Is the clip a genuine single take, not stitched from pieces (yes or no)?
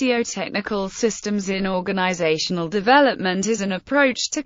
no